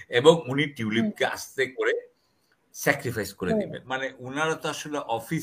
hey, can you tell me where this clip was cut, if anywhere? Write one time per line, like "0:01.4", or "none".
0:03.8